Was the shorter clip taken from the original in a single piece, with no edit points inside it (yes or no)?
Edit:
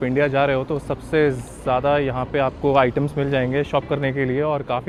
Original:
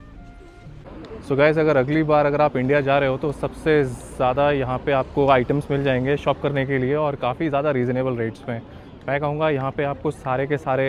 yes